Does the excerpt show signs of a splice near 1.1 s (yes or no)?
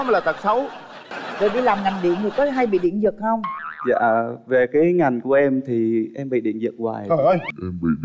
yes